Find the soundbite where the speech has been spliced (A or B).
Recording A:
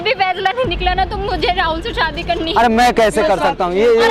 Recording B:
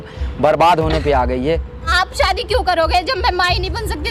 B